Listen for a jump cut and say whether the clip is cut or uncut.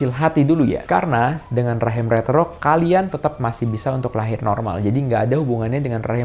uncut